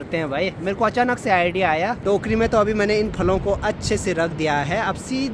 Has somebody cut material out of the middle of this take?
yes; 1 cut; at 2.0 s

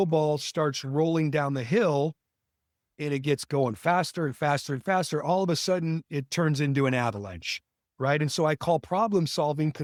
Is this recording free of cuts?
yes; 0 cuts

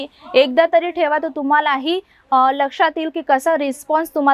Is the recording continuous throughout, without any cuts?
yes; 0 cuts

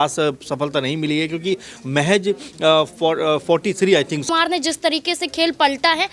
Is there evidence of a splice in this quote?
yes; 1 cut; at 4.3 s

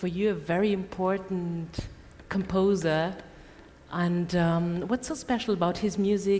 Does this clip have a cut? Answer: yes; 1 cut; at 2.5 s

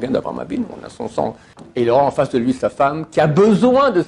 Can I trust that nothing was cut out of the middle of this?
no; 1 cut; at 1.5 s

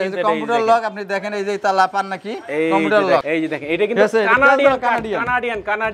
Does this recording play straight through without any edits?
no; 1 cut; at 3.2 s

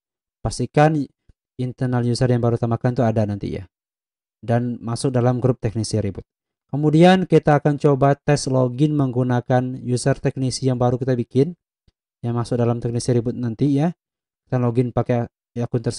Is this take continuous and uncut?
yes; 0 cuts

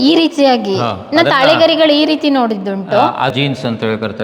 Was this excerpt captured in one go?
no; 1 cut; at 3.3 s

